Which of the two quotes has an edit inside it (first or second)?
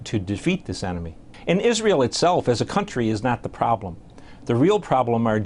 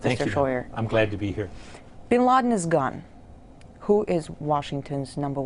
second